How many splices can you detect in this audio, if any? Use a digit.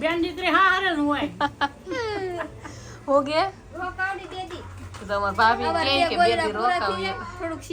0